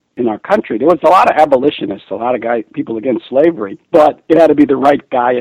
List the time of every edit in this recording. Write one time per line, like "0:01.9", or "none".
0:04.2